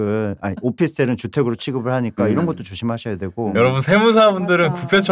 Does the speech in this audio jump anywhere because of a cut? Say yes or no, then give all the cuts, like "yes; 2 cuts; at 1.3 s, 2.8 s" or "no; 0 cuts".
no; 0 cuts